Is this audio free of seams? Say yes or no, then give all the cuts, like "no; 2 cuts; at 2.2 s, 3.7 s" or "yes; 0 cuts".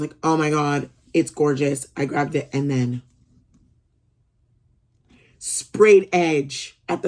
yes; 0 cuts